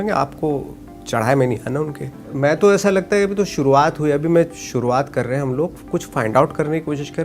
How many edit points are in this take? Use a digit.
1